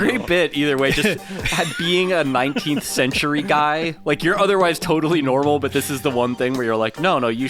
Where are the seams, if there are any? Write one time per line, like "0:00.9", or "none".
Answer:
none